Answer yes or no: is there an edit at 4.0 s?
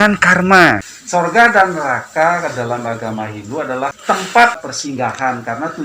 yes